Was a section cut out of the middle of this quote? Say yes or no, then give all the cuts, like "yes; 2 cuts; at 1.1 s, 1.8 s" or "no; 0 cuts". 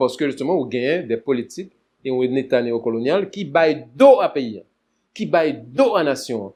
no; 0 cuts